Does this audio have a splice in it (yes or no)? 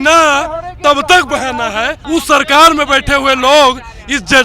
yes